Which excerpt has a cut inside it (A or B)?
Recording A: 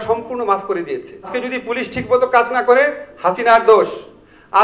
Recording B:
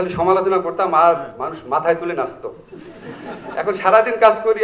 A